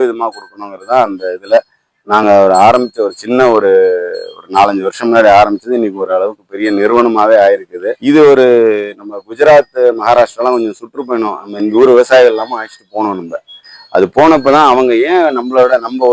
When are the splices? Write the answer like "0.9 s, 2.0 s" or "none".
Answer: 8.0 s